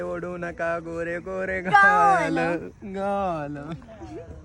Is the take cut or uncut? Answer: uncut